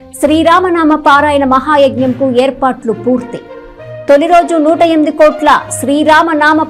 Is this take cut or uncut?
uncut